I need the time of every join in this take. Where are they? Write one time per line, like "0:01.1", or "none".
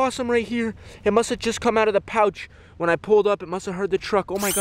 none